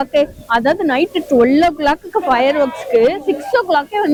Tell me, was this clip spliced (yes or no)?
no